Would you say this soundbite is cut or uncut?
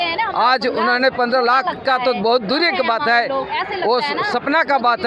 uncut